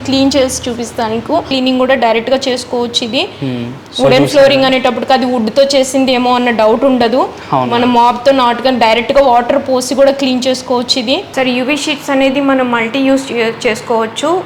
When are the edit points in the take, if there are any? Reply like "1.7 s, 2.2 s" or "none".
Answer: 1.5 s, 11.3 s